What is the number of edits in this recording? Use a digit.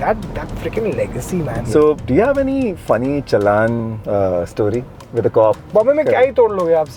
3